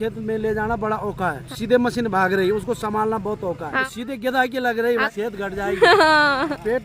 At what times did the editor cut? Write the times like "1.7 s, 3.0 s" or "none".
1.4 s, 3.8 s, 5.0 s